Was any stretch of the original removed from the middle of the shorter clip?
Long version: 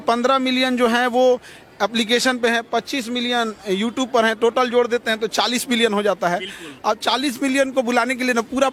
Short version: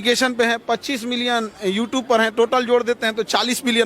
no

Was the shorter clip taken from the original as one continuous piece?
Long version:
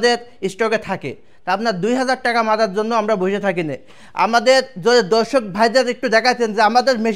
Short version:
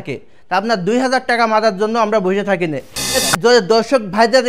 no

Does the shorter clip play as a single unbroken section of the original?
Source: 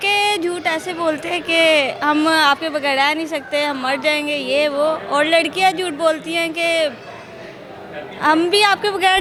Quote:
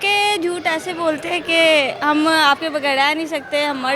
yes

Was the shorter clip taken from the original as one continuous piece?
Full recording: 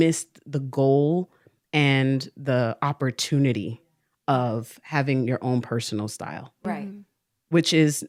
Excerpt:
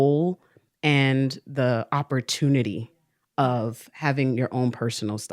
yes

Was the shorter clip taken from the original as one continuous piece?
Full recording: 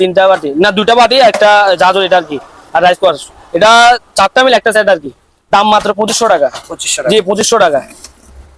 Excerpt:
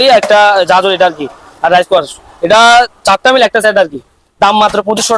yes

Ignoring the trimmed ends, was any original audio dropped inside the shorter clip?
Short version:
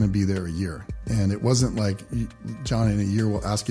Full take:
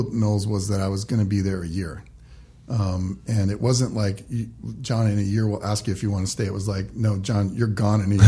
yes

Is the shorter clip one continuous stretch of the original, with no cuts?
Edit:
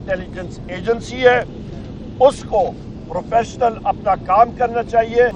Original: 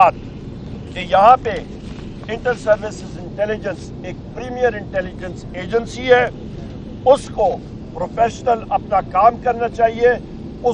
yes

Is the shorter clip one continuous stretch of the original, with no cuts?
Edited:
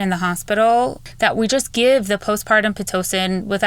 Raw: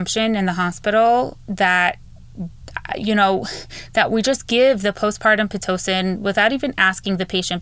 no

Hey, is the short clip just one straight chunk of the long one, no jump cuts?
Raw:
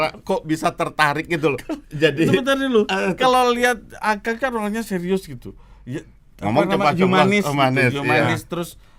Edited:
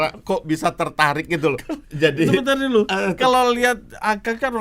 yes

